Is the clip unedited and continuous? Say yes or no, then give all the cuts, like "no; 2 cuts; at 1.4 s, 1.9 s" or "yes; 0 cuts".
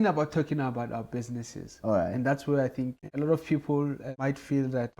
no; 2 cuts; at 3.0 s, 4.1 s